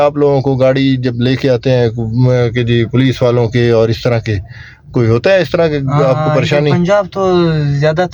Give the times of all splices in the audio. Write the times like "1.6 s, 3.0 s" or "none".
none